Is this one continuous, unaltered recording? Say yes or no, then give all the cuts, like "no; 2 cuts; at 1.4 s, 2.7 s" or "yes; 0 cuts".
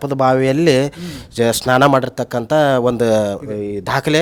yes; 0 cuts